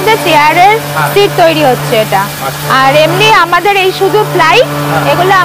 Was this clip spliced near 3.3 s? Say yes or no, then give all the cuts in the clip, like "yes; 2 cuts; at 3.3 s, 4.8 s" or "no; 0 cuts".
no; 0 cuts